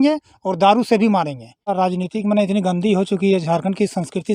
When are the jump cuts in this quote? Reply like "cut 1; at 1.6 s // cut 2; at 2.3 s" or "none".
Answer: cut 1; at 1.7 s

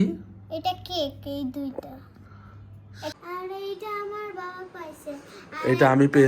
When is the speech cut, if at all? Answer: cut 1; at 3.1 s

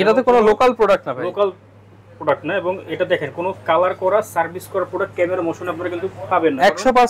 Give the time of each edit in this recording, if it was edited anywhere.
none

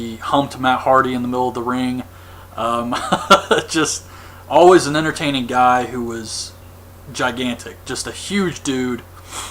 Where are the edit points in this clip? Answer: cut 1; at 4.2 s

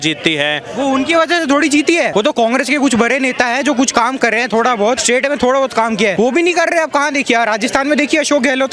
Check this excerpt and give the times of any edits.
cut 1; at 2.1 s // cut 2; at 5.0 s // cut 3; at 6.1 s

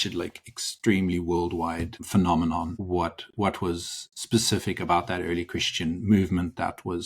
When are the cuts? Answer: cut 1; at 2.0 s // cut 2; at 2.8 s

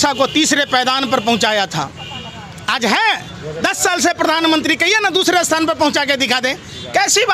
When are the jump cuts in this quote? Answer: none

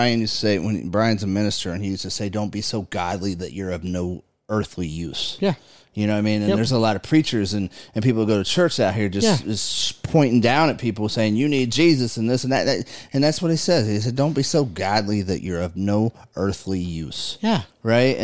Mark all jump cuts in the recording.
none

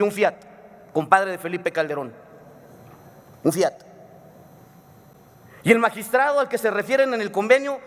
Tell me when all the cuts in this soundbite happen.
cut 1; at 5.2 s

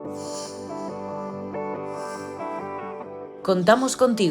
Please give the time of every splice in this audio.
cut 1; at 3.1 s

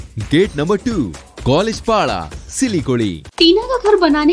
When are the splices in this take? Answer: cut 1; at 3.2 s

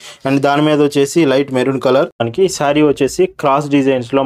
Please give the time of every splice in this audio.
cut 1; at 2.3 s

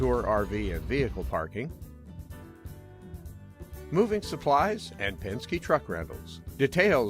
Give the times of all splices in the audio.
cut 1; at 2.4 s

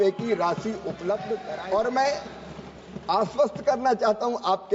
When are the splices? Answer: cut 1; at 1.5 s

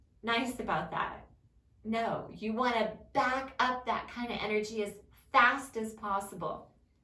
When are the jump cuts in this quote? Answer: none

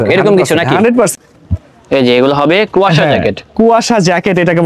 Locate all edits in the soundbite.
cut 1; at 1.1 s

